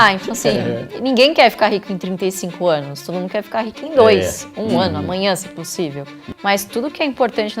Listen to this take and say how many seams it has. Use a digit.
1